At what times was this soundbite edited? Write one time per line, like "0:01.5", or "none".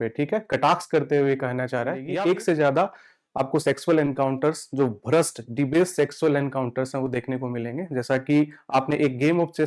0:02.1